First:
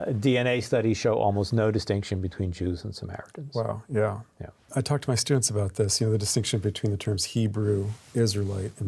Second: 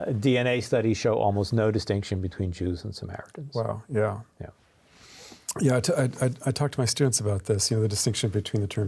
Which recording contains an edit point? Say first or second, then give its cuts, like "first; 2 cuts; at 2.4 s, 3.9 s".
first; 1 cut; at 4.7 s